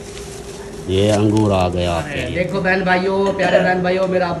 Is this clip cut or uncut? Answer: cut